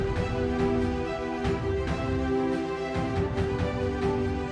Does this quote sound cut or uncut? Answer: uncut